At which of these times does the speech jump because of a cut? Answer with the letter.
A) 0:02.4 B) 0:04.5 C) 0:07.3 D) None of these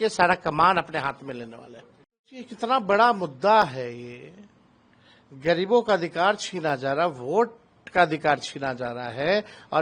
A